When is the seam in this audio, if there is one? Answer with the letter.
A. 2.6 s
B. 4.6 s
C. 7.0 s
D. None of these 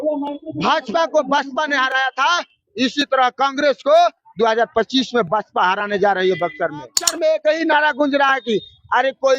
C